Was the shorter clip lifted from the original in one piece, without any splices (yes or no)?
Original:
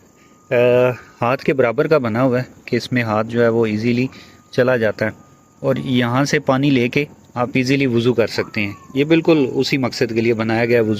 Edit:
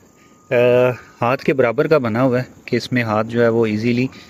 yes